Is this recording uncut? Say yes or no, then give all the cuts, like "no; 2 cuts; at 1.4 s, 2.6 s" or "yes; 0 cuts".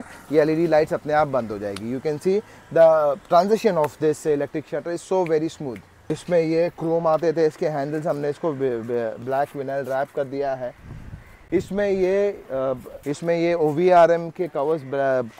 no; 2 cuts; at 6.2 s, 12.9 s